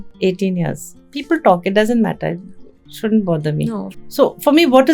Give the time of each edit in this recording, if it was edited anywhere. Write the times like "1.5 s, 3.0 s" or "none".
0.9 s, 4.0 s